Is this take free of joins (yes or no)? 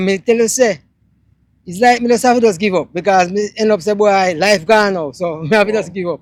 yes